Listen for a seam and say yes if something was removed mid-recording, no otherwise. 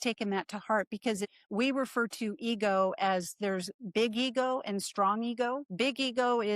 yes